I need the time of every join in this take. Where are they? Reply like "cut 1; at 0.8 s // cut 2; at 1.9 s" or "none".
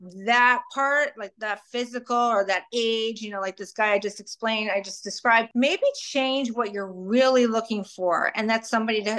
cut 1; at 5.5 s